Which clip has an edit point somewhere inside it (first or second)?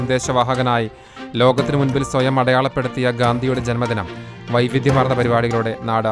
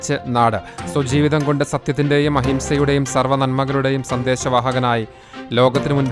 second